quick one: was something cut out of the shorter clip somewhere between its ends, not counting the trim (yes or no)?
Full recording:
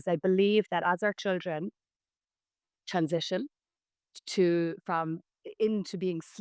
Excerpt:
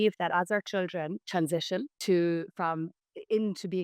yes